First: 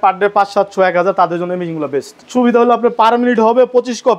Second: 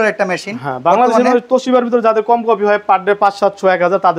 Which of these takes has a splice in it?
first; 1 cut; at 2.2 s

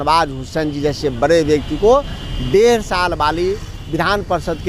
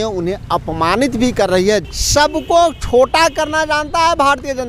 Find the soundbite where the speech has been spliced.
second; 1 cut; at 1.9 s

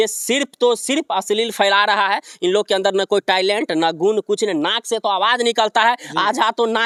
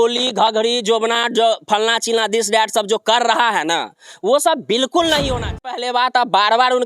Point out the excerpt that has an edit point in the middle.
second; 1 cut; at 5.8 s

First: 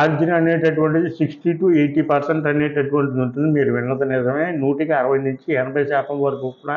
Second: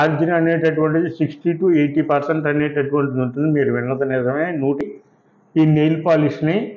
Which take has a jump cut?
second; 1 cut; at 4.8 s

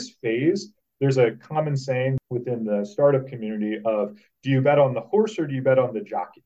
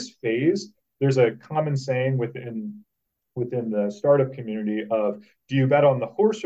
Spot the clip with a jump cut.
first; 1 cut; at 2.2 s

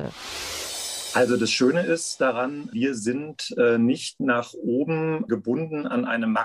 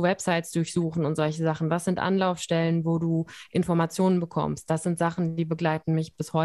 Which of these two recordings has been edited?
first; 3 cuts; at 0.8 s, 2.7 s, 5.3 s

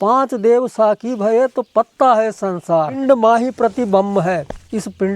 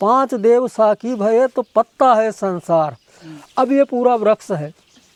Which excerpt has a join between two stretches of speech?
first; 1 cut; at 3.0 s

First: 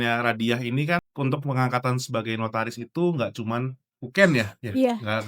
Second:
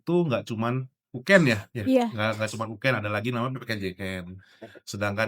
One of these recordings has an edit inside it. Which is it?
first; 1 cut; at 1.1 s

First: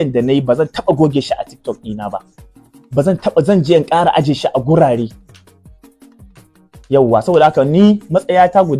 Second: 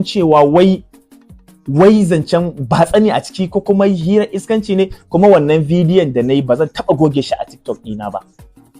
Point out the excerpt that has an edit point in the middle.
second; 1 cut; at 5.0 s

